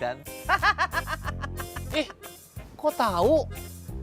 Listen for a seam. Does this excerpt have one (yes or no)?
no